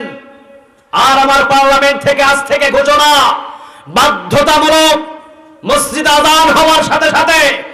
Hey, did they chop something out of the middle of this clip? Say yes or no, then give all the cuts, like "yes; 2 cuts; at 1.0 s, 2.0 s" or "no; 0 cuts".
no; 0 cuts